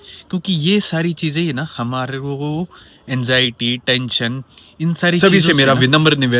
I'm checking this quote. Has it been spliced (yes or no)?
yes